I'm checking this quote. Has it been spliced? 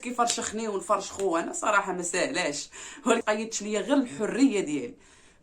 yes; 1 cut; at 3.2 s

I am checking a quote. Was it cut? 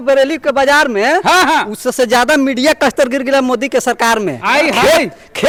no; 0 cuts

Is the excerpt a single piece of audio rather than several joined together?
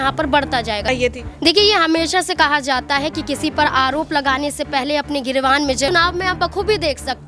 no; 2 cuts; at 0.9 s, 5.9 s

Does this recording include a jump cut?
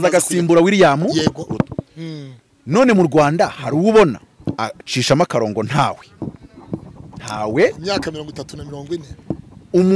no; 0 cuts

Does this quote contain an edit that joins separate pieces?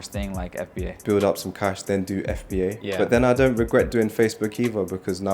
yes; 2 cuts; at 1.0 s, 2.9 s

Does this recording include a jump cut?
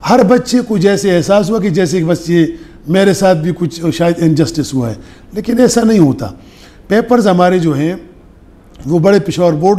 no; 0 cuts

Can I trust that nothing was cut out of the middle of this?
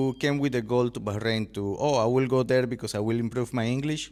yes; 0 cuts

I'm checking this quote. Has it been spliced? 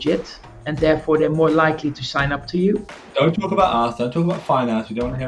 yes; 1 cut; at 2.9 s

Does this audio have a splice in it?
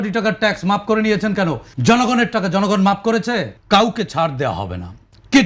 yes; 2 cuts; at 1.7 s, 3.5 s

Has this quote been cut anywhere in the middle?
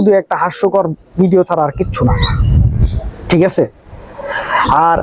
no; 0 cuts

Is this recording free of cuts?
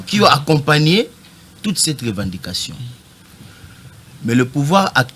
yes; 0 cuts

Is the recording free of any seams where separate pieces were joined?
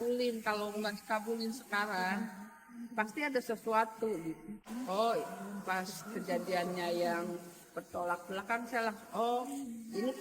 yes; 0 cuts

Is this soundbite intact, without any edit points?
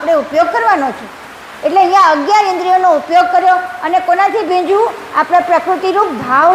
yes; 0 cuts

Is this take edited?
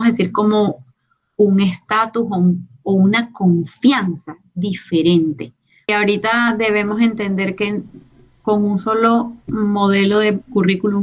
yes; 1 cut; at 5.9 s

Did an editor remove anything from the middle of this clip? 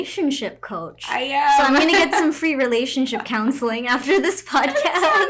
no; 0 cuts

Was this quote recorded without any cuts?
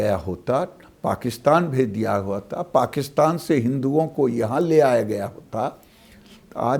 yes; 0 cuts

